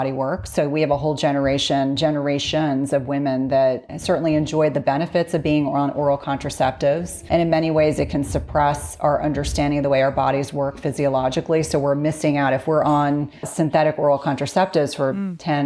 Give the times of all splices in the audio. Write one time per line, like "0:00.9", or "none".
0:03.9
0:07.1
0:13.5